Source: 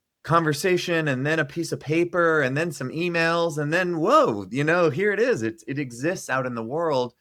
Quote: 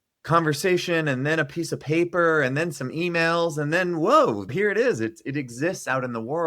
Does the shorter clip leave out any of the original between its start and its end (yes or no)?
yes